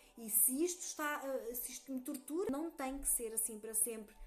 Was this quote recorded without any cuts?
no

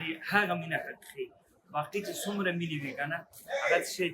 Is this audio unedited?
yes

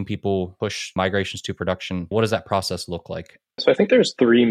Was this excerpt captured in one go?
no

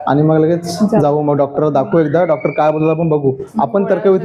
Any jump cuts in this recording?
no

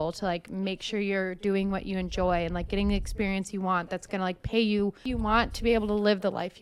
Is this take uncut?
no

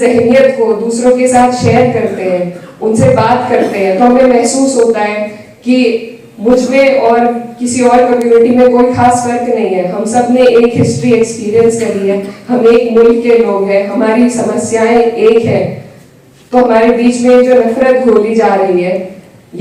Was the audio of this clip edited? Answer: no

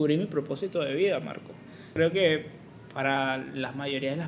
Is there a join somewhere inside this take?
yes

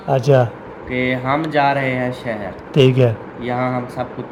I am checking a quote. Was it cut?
no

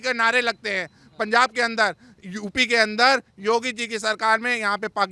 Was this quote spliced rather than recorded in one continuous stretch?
no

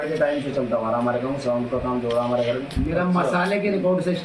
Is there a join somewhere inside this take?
no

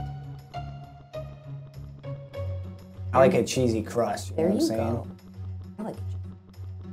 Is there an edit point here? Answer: no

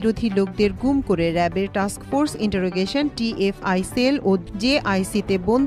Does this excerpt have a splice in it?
yes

